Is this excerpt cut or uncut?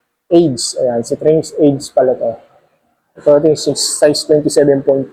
uncut